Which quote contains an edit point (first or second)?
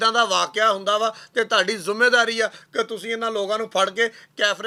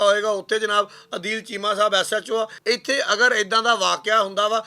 second